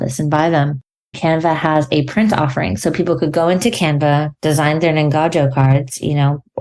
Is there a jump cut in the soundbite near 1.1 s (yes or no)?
yes